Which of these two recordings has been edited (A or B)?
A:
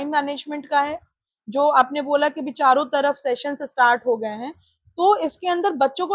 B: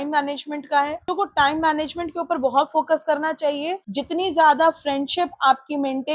B